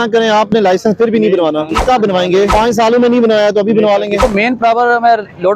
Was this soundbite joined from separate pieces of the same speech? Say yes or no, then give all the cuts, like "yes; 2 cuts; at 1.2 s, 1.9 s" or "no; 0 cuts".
yes; 3 cuts; at 1.8 s, 2.5 s, 4.2 s